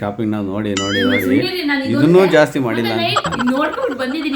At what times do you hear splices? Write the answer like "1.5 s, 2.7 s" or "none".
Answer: 3.2 s